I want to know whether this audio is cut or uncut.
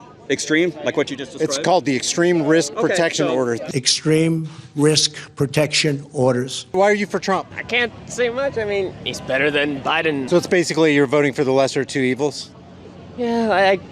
cut